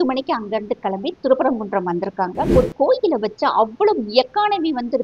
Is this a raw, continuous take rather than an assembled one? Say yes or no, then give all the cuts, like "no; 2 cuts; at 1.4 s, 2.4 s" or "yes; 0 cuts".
no; 1 cut; at 2.5 s